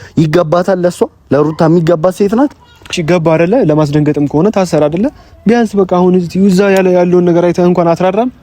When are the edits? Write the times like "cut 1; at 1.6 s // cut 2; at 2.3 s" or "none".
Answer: cut 1; at 3.0 s

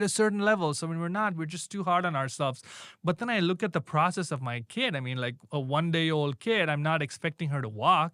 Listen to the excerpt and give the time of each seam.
none

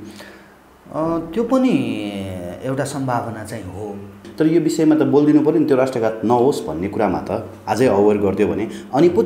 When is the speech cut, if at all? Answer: cut 1; at 4.2 s

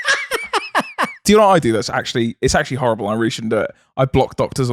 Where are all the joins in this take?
cut 1; at 1.3 s

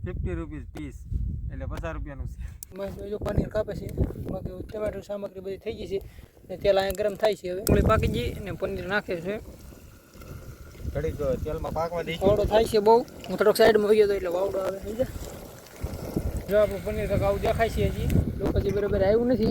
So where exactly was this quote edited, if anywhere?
cut 1; at 2.7 s // cut 2; at 7.6 s // cut 3; at 16.4 s

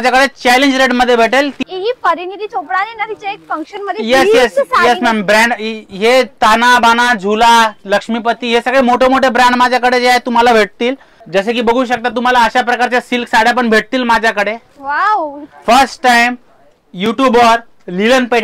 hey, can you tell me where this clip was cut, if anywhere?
cut 1; at 1.6 s // cut 2; at 11.2 s // cut 3; at 15.5 s

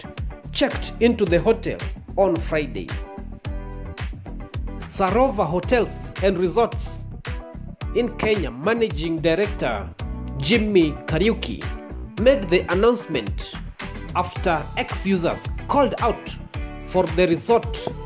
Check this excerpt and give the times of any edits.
cut 1; at 2.9 s // cut 2; at 4.6 s

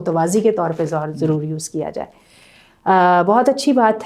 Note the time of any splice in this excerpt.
none

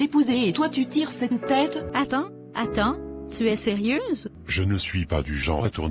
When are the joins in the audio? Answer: cut 1; at 1.9 s // cut 2; at 4.4 s

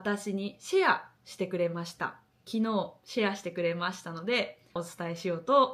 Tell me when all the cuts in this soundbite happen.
cut 1; at 4.8 s

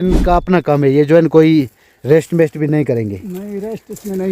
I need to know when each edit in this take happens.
none

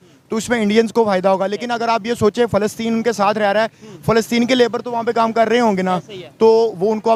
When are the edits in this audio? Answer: none

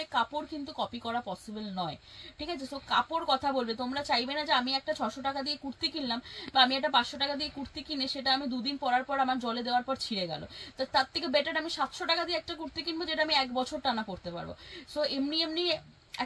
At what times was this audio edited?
none

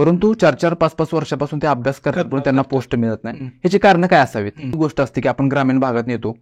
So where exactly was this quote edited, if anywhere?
cut 1; at 4.8 s

